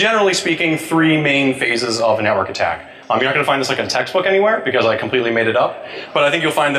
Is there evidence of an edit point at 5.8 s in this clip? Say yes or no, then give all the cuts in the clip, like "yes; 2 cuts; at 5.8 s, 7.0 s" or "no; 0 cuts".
no; 0 cuts